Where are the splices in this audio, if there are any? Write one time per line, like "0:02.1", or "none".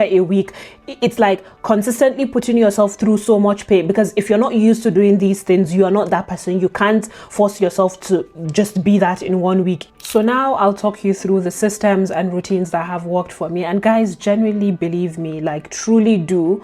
none